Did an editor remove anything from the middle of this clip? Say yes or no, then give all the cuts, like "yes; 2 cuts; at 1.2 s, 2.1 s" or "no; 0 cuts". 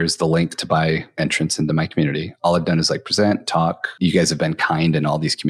yes; 2 cuts; at 1.2 s, 3.9 s